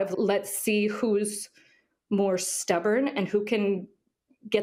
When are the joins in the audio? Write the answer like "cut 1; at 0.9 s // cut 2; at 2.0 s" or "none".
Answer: none